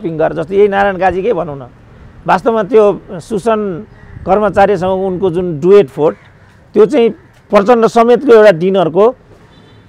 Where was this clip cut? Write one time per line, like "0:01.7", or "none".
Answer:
none